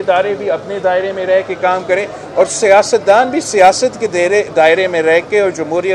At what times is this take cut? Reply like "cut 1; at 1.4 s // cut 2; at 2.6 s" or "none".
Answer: none